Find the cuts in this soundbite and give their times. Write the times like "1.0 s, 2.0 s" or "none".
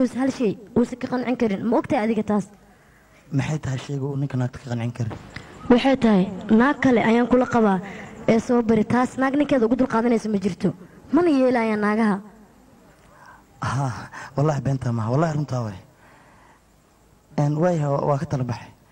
none